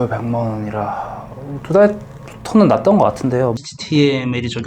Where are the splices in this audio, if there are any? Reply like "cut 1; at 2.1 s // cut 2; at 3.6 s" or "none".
cut 1; at 3.5 s